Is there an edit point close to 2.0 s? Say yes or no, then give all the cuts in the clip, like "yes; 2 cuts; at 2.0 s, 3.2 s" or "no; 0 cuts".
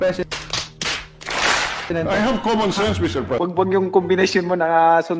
no; 1 cut; at 3.3 s